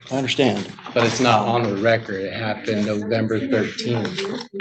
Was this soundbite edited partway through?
no; 0 cuts

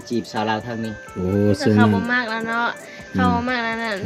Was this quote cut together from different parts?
no; 0 cuts

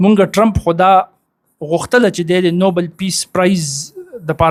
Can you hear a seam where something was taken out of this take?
no; 0 cuts

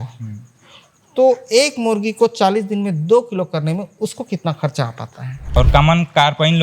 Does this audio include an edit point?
yes; 1 cut; at 5.5 s

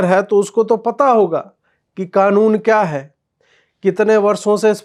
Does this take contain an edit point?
no; 0 cuts

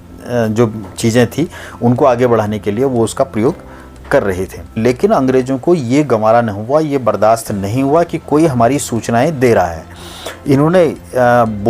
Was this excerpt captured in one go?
no; 1 cut; at 4.8 s

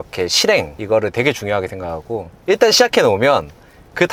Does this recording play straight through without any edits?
yes; 0 cuts

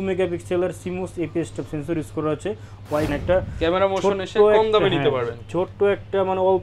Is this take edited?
yes; 1 cut; at 3.1 s

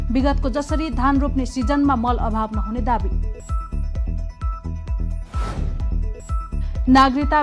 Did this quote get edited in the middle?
no; 0 cuts

